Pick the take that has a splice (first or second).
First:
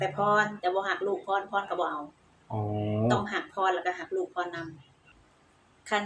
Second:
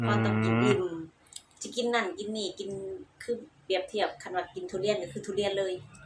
first